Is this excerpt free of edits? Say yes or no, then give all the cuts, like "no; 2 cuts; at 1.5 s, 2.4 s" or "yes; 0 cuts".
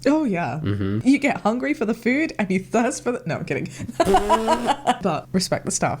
yes; 0 cuts